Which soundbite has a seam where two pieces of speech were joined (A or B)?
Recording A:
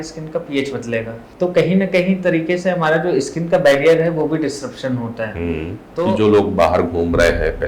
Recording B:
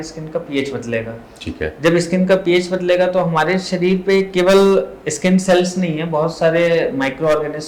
A